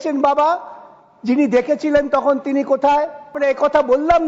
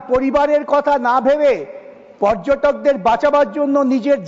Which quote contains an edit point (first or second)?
first